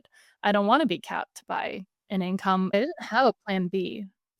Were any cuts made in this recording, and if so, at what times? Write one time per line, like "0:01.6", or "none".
0:02.7